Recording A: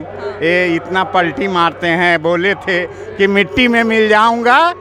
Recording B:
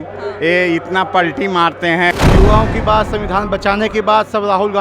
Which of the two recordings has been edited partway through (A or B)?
B